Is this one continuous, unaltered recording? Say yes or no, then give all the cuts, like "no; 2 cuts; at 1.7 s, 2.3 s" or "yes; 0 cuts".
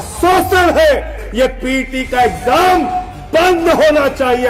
no; 1 cut; at 1.2 s